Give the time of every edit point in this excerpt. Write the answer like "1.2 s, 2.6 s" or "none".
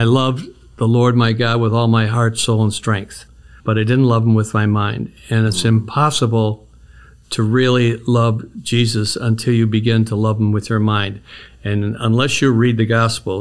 3.4 s